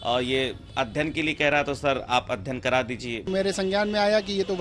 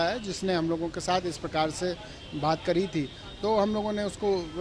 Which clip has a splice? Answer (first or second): first